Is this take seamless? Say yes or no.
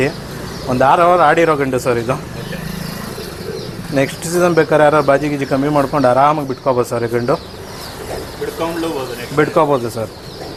yes